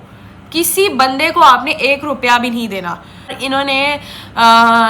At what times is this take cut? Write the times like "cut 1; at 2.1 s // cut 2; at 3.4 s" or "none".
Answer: cut 1; at 3.4 s

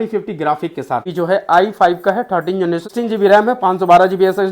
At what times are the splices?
cut 1; at 1.1 s // cut 2; at 2.9 s

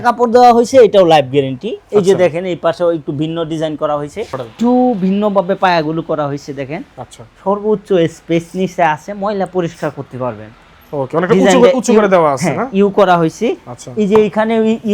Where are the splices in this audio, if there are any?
cut 1; at 4.4 s

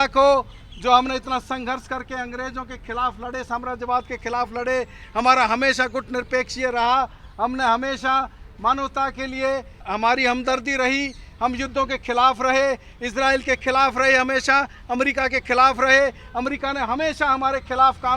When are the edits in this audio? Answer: cut 1; at 9.9 s

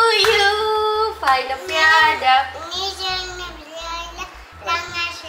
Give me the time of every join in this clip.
none

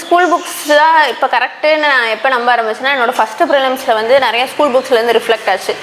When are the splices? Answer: none

